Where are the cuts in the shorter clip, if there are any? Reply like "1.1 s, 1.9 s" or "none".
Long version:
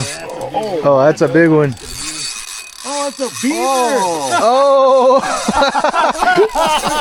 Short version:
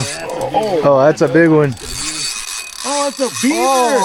none